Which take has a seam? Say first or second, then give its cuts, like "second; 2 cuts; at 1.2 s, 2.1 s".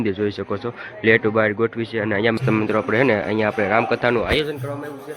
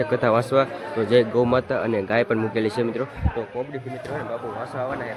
first; 1 cut; at 2.4 s